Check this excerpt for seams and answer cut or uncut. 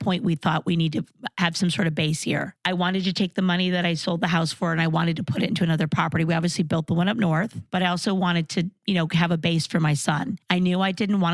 cut